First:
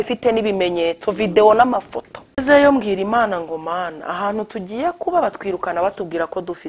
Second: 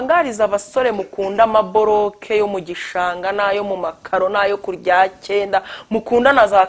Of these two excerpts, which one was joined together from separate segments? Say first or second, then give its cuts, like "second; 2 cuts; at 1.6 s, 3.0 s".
first; 1 cut; at 2.4 s